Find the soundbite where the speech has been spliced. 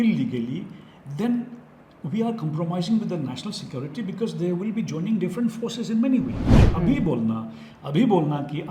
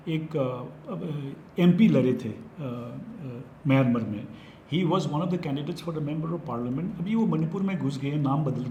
first; 1 cut; at 6.7 s

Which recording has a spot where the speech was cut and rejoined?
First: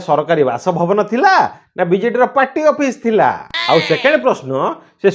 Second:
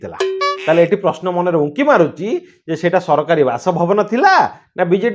first; 1 cut; at 3.5 s

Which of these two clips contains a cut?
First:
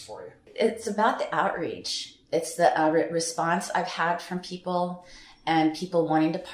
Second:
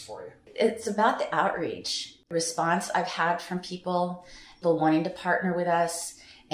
second; 2 cuts; at 2.3 s, 4.5 s

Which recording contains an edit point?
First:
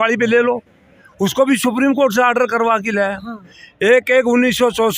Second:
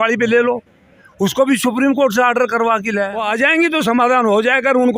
second; 1 cut; at 3.2 s

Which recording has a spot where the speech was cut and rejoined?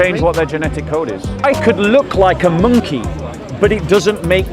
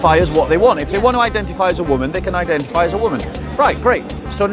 first; 1 cut; at 1.4 s

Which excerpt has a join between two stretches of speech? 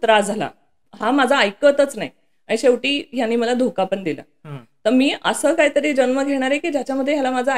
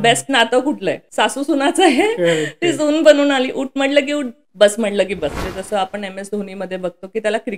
second; 3 cuts; at 1.0 s, 4.4 s, 5.4 s

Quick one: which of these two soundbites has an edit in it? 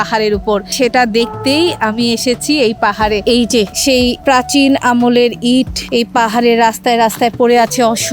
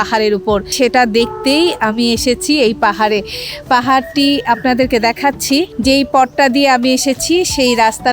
first; 2 cuts; at 3.2 s, 5.8 s

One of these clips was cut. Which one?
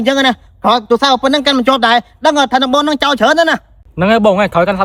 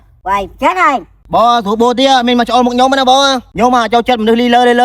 second; 1 cut; at 3.5 s

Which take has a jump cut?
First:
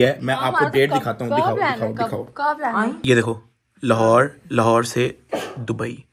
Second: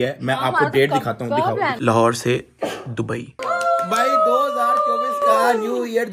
second; 2 cuts; at 1.7 s, 3.4 s

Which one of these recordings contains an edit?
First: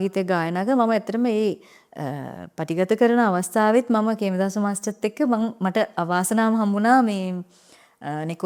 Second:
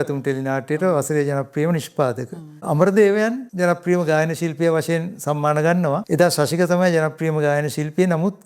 second; 3 cuts; at 2.6 s, 3.4 s, 6.0 s

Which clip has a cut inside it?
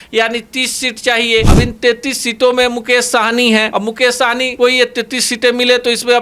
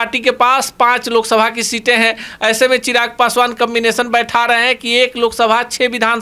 first; 2 cuts; at 1.5 s, 4.1 s

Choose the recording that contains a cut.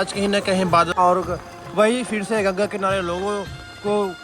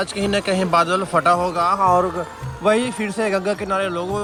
first; 1 cut; at 0.9 s

